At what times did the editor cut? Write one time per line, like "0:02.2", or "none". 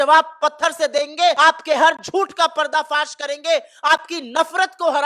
0:01.4